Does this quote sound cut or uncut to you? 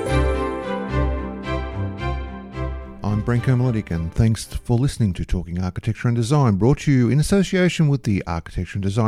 cut